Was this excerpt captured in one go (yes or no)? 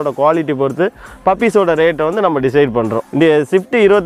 no